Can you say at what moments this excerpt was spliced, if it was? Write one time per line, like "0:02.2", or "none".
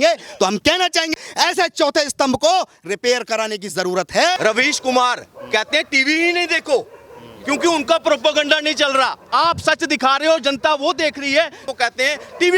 0:01.2
0:04.4
0:11.7

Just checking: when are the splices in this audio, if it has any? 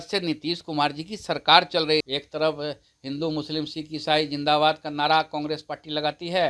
0:02.1

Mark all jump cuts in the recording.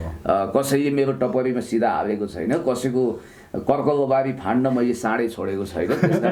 none

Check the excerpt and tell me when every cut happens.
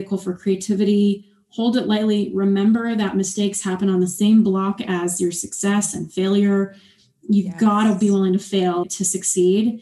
0:08.8

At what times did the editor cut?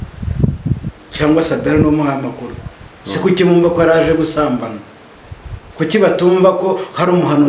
none

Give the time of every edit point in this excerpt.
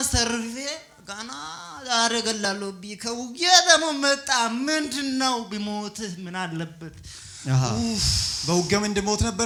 none

